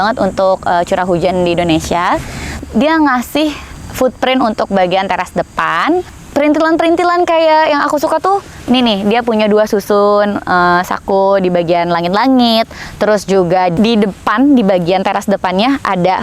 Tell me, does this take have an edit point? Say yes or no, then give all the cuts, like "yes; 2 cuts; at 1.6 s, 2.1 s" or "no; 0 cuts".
yes; 4 cuts; at 2.5 s, 3.7 s, 6.2 s, 13.7 s